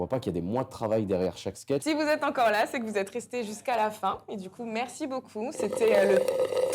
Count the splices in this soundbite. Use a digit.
1